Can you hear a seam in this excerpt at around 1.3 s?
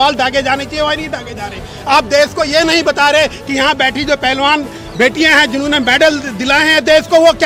no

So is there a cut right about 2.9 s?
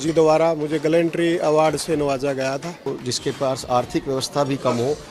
yes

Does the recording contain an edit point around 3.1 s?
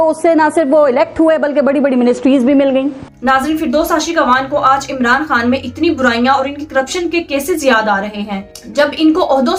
no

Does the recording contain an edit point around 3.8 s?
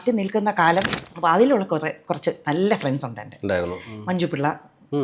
no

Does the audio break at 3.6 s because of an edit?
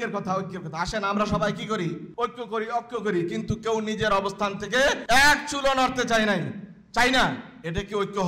no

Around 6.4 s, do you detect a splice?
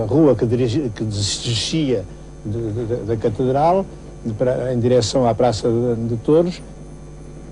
no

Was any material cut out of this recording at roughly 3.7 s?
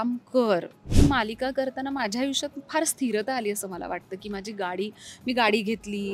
no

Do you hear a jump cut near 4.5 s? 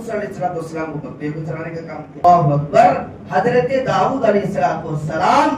no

